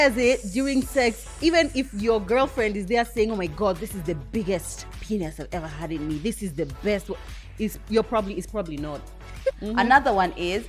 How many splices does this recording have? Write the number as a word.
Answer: one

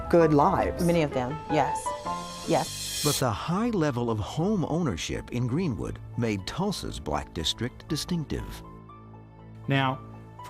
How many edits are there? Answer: one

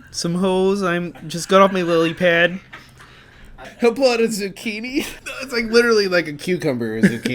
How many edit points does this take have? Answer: one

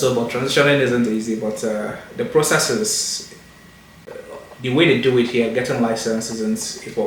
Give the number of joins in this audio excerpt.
one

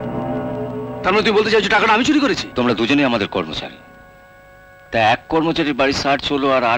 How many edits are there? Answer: one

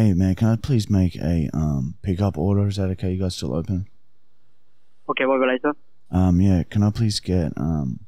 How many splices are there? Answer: zero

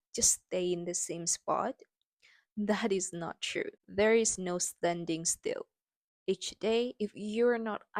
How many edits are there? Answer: zero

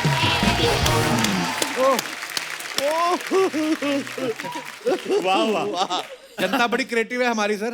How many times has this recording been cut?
zero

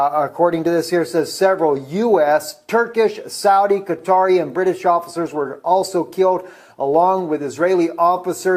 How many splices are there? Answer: one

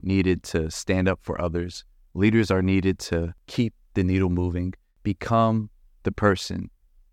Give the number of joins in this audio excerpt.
two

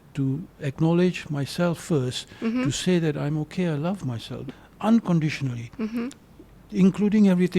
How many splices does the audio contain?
one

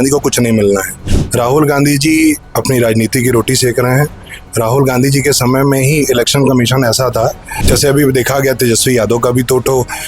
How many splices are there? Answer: two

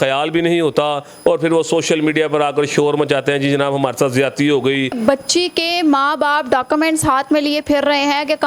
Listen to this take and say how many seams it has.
one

